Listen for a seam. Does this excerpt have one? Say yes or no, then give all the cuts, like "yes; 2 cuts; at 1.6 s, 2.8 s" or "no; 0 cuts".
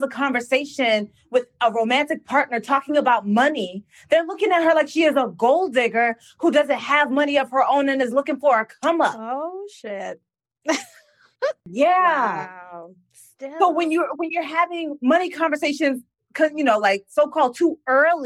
yes; 1 cut; at 11.6 s